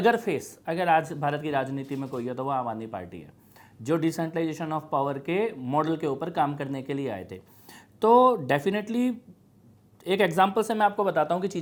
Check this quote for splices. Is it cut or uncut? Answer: uncut